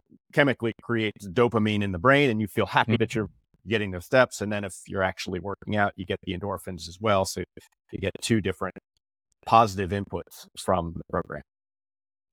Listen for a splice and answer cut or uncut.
cut